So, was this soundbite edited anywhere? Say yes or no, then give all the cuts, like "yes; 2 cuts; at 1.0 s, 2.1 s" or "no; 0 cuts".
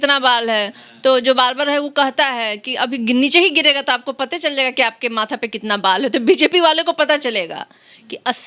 no; 0 cuts